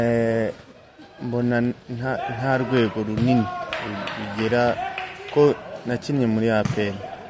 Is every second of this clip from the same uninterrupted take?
yes; 0 cuts

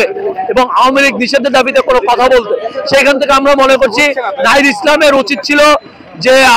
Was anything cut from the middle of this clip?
no; 0 cuts

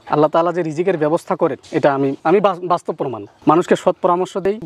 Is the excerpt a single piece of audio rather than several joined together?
yes; 0 cuts

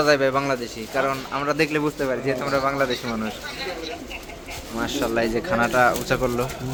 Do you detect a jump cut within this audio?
no; 0 cuts

